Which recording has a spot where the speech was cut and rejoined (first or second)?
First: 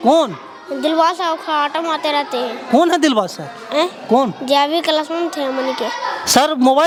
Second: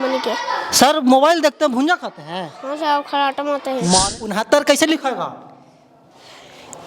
second